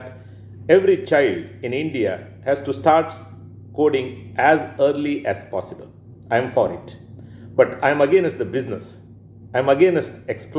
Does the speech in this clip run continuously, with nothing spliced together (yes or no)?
yes